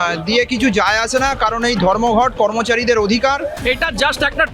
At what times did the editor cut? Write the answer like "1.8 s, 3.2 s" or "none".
3.6 s